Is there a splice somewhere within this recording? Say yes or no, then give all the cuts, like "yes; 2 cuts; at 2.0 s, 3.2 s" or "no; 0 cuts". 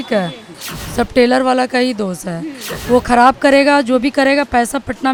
no; 0 cuts